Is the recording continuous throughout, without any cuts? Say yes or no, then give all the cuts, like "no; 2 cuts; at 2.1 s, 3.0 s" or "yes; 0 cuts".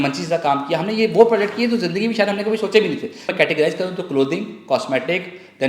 no; 1 cut; at 3.3 s